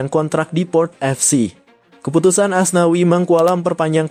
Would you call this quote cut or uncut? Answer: uncut